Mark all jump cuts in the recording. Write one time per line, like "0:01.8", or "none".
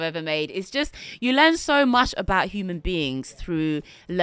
none

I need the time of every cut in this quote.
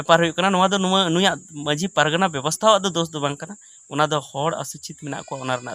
none

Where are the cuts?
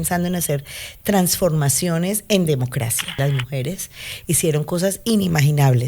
0:03.0

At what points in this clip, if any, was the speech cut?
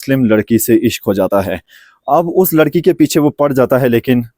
none

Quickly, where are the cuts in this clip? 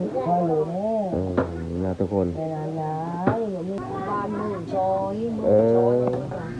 0:03.8

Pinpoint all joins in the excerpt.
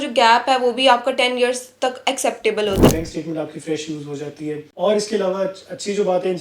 0:02.9
0:04.7

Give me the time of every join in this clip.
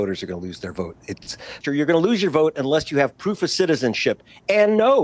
0:01.6

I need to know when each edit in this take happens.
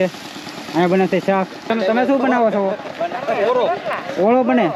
0:01.7

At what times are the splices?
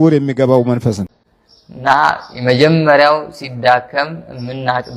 0:01.1

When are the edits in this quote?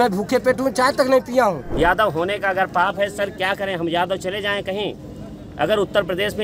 0:01.6

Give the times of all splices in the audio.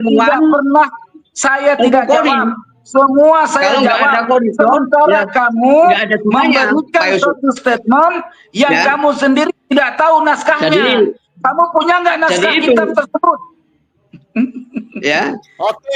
none

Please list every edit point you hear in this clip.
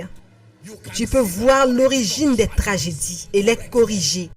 0:03.2

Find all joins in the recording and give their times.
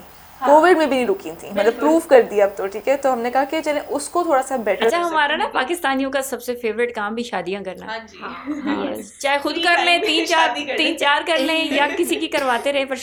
none

